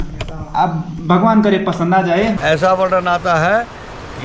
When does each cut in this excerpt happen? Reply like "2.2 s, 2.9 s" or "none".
2.4 s